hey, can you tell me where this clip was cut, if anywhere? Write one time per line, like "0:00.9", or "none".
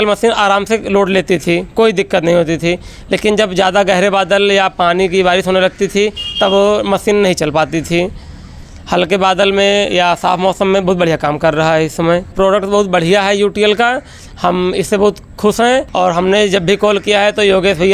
0:12.3
0:15.9